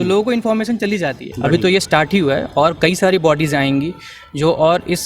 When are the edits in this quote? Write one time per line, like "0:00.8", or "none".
0:01.3